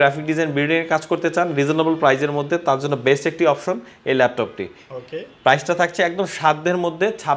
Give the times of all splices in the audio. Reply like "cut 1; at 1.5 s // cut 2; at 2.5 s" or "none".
none